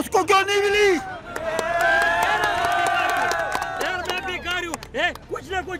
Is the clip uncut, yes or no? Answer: yes